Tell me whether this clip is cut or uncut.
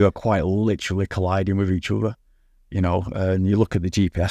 uncut